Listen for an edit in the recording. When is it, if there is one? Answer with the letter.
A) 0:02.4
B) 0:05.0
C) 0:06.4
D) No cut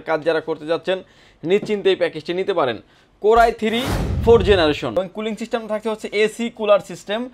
B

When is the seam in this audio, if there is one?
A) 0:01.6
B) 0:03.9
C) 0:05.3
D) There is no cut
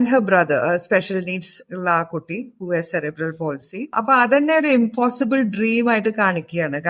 B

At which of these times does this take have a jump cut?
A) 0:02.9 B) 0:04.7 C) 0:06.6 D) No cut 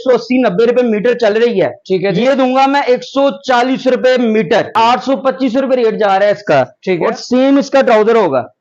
B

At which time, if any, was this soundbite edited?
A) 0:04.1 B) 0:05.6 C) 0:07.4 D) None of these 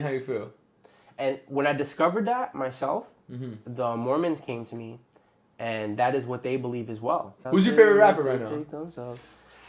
C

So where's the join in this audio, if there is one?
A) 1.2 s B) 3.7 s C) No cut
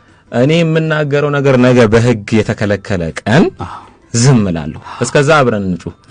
C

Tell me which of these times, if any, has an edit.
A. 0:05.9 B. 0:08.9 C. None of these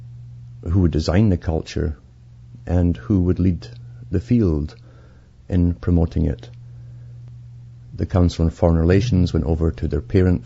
B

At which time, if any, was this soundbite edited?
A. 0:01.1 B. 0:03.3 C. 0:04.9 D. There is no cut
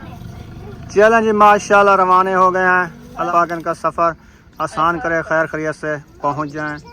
B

